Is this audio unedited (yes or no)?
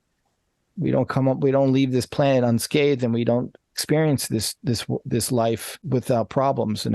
no